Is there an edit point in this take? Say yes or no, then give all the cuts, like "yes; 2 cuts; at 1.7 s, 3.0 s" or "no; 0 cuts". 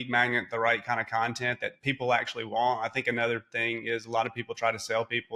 no; 0 cuts